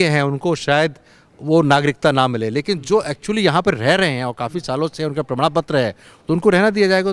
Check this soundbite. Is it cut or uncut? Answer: uncut